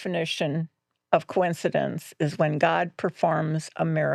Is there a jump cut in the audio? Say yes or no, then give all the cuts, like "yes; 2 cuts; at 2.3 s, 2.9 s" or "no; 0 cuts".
no; 0 cuts